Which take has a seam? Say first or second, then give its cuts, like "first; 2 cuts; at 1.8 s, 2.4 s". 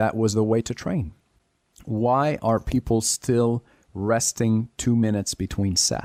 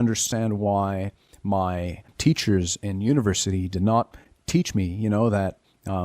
second; 1 cut; at 2.1 s